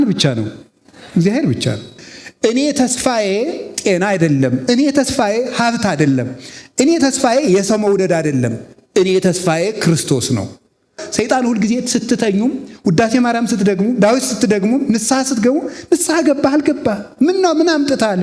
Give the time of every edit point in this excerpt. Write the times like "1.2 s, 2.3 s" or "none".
1.9 s, 11.0 s